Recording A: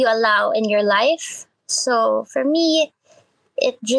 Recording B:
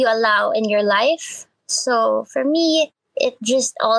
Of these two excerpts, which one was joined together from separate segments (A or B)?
B